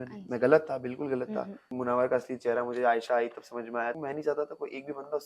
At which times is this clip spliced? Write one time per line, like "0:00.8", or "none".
0:01.7
0:04.0